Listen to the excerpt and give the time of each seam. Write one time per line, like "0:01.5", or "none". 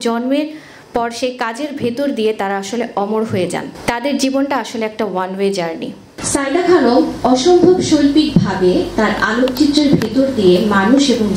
0:03.7
0:06.1